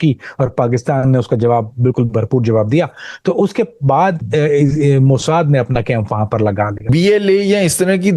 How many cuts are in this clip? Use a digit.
1